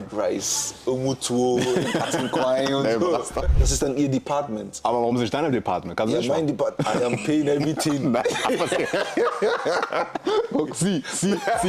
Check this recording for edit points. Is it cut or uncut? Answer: cut